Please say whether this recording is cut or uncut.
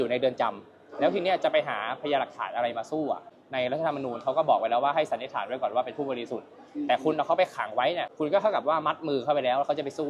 cut